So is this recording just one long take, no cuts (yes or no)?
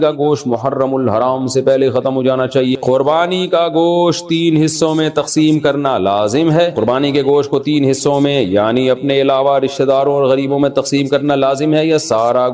no